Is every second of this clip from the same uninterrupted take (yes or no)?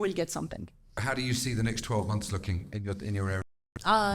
no